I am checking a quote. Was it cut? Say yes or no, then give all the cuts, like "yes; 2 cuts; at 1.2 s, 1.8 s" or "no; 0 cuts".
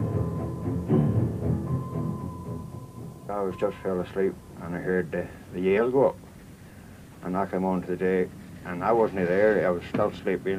no; 0 cuts